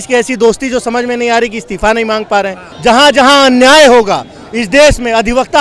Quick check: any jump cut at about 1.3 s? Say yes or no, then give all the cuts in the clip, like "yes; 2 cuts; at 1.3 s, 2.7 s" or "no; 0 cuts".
no; 1 cut; at 2.6 s